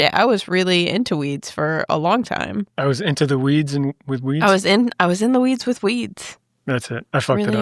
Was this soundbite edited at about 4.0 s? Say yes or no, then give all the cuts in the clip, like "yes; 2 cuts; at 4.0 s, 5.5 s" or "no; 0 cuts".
no; 1 cut; at 2.7 s